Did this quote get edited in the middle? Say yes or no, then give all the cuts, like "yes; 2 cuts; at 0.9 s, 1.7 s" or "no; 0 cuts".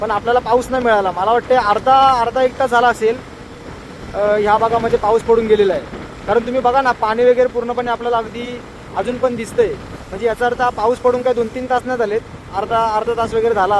no; 0 cuts